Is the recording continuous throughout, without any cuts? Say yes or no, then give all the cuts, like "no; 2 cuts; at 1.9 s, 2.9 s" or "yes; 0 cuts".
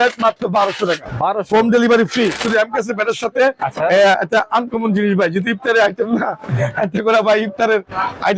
no; 1 cut; at 2.4 s